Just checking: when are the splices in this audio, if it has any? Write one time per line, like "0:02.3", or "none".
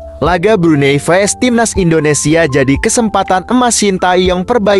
none